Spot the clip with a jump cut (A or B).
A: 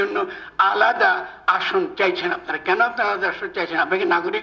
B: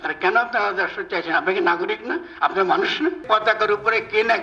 B